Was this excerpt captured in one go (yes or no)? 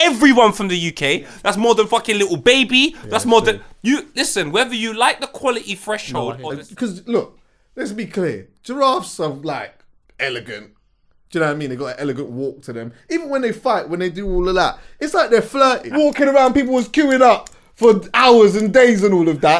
no